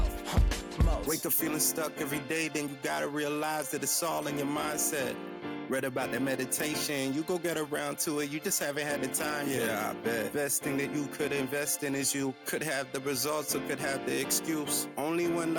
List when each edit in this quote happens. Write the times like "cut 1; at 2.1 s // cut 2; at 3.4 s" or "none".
none